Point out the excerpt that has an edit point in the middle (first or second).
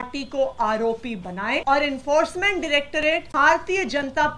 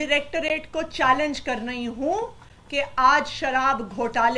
first